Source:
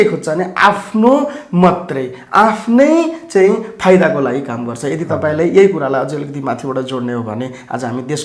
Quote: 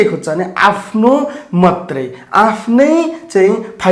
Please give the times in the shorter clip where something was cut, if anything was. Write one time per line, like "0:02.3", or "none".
none